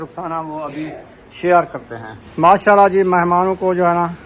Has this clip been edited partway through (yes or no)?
yes